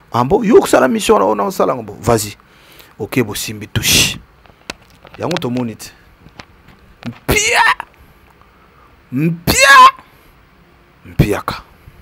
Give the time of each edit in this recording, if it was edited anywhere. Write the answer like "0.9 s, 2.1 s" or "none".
none